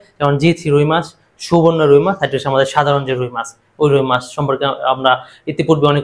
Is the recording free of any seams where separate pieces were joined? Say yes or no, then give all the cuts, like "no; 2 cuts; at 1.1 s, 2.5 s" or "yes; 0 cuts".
yes; 0 cuts